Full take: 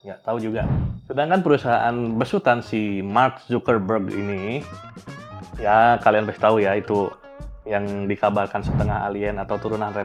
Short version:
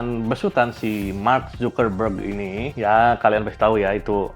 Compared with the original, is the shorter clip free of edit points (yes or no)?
no